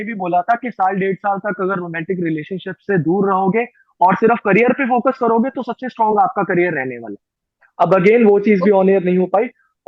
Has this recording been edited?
no; 0 cuts

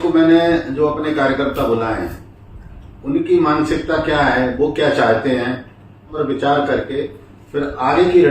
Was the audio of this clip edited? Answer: yes; 1 cut; at 6.1 s

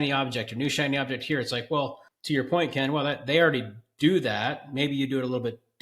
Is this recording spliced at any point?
yes; 1 cut; at 2.1 s

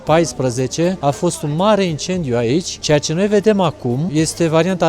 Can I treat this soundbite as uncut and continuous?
no; 3 cuts; at 1.0 s, 2.7 s, 4.0 s

